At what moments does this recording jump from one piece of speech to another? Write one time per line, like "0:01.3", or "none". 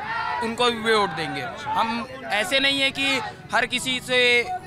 none